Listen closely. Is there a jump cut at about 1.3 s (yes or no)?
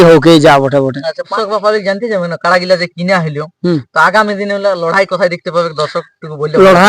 yes